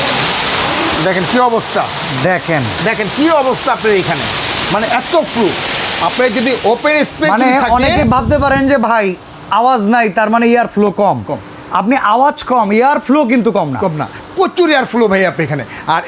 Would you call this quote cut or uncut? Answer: uncut